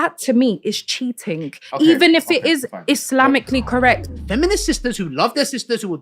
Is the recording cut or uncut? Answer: cut